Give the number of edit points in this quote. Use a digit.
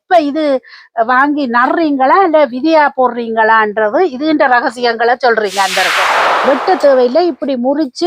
1